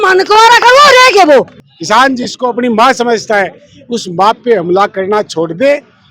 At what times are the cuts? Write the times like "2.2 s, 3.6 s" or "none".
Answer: 1.6 s